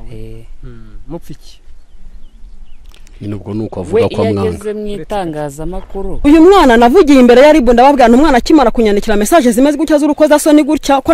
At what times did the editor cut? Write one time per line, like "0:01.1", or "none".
0:06.0